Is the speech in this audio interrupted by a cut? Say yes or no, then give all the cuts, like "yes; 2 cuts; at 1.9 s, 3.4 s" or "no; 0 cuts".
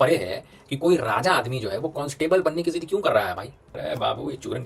yes; 1 cut; at 3.6 s